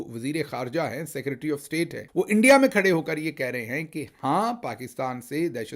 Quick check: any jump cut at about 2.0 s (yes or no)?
yes